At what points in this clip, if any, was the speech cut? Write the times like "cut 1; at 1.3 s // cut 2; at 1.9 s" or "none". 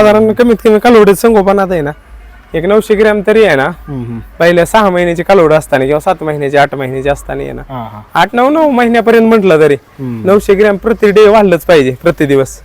none